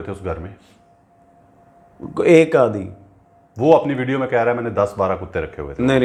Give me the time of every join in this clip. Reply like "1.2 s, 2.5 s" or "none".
none